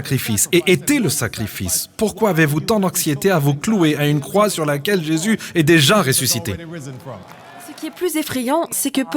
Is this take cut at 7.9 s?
yes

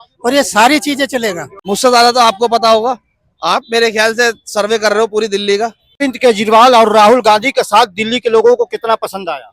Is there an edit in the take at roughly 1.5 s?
yes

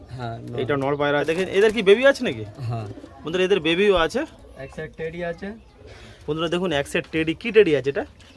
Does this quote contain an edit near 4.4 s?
yes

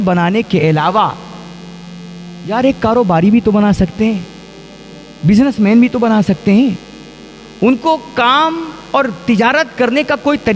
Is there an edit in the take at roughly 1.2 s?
no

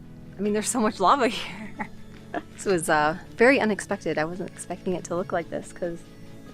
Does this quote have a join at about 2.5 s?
yes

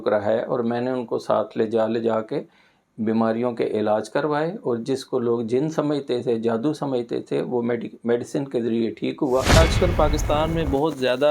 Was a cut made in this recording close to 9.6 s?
yes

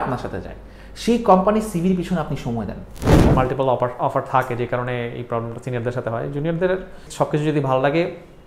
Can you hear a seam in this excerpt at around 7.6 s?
no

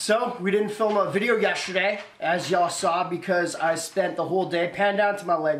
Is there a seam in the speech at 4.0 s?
no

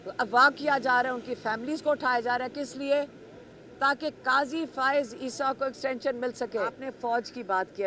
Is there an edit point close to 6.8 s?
yes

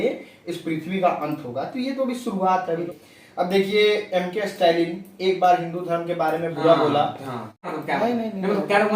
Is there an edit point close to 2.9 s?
yes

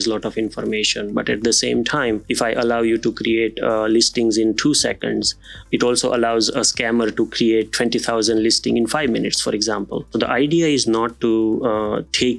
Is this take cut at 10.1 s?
yes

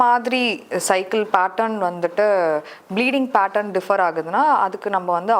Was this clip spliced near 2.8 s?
no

